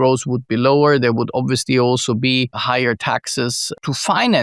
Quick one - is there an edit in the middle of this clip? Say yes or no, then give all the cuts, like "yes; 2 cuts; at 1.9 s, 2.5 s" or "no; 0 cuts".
yes; 1 cut; at 2.6 s